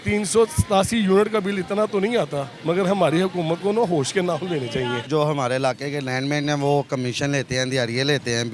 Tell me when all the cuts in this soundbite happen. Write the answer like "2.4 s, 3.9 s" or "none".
2.5 s, 5.1 s